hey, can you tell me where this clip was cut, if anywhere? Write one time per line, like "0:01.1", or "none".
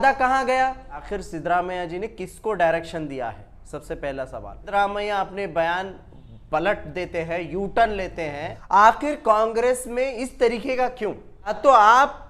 0:01.1
0:04.6
0:08.5
0:11.6